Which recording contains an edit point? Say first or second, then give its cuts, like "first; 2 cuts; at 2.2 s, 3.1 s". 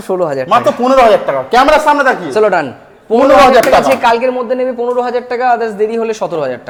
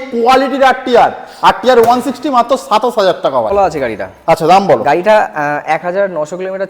second; 1 cut; at 3.5 s